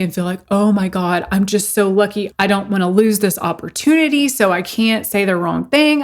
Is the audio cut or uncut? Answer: cut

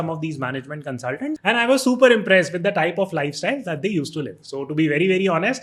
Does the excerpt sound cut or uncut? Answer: uncut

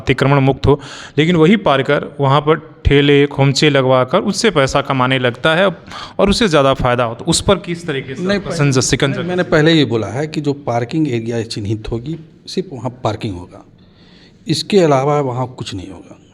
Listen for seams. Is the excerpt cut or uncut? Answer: uncut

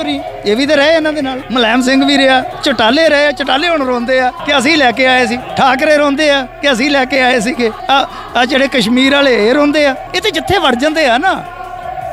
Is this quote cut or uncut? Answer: cut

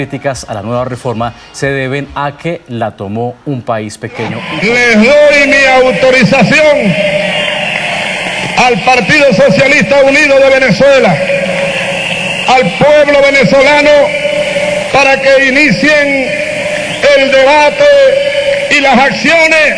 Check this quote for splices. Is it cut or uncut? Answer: cut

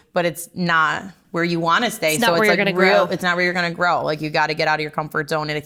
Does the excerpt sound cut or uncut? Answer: uncut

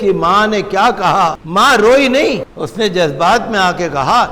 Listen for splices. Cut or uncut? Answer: cut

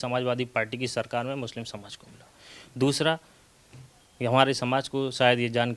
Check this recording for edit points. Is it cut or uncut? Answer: uncut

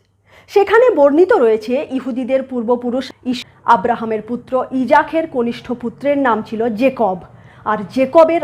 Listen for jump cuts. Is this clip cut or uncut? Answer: cut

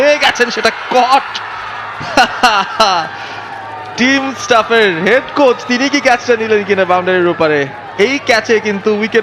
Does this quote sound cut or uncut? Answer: uncut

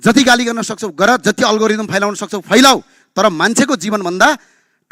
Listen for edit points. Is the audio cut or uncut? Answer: uncut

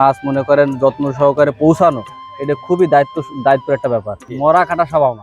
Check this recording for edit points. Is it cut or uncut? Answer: cut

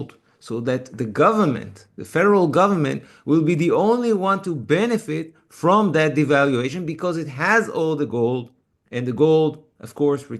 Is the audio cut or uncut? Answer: uncut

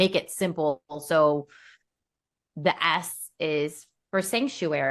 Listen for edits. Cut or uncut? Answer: uncut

